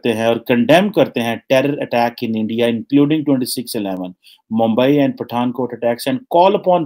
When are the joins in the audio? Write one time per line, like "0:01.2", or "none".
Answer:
none